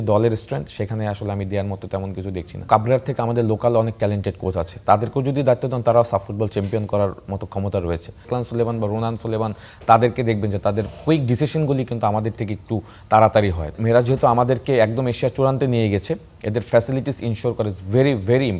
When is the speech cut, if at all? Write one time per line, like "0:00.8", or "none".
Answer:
0:02.6
0:08.3
0:13.8